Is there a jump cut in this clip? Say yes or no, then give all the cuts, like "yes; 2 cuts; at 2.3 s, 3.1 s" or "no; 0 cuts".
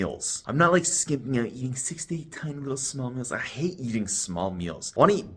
no; 0 cuts